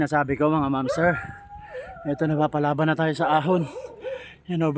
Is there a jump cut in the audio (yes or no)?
no